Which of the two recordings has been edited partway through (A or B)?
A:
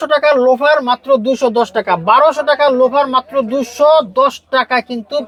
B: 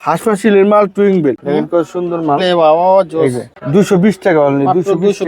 B